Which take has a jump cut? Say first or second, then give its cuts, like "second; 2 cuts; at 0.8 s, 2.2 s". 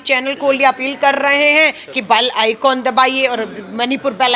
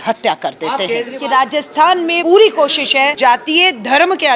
second; 3 cuts; at 1.1 s, 2.2 s, 3.1 s